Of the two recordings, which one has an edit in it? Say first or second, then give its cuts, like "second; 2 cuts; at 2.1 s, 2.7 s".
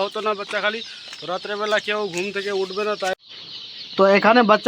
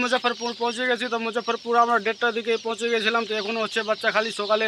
first; 1 cut; at 3.1 s